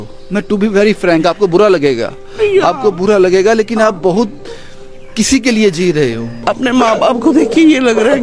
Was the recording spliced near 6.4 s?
yes; 1 cut; at 6.4 s

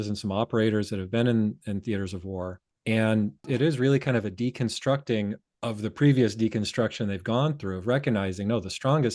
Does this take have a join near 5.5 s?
yes; 3 cuts; at 2.7 s, 3.5 s, 5.5 s

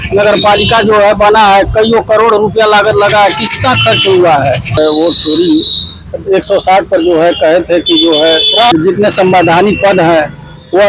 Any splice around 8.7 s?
yes; 2 cuts; at 4.8 s, 8.7 s

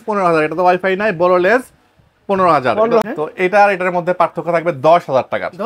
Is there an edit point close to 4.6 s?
no; 1 cut; at 3.0 s

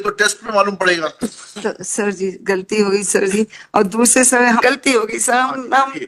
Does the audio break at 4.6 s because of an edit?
yes; 1 cut; at 4.6 s

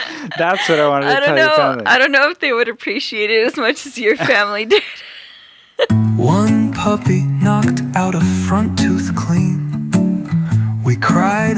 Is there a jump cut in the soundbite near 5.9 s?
yes; 1 cut; at 5.9 s

